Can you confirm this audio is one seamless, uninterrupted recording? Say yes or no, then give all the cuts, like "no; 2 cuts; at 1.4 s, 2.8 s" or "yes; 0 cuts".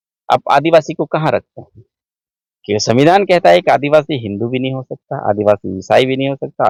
yes; 0 cuts